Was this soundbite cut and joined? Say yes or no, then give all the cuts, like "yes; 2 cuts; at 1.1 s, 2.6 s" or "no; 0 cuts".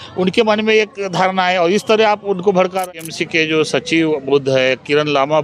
yes; 1 cut; at 2.9 s